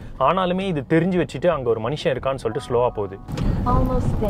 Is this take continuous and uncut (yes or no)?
no